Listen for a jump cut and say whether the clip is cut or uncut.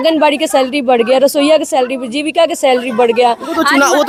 uncut